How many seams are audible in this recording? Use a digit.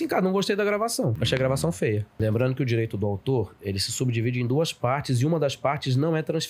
2